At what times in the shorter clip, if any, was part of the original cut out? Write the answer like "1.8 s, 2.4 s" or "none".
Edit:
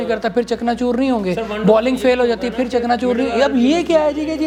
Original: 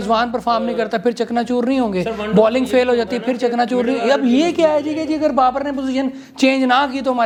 none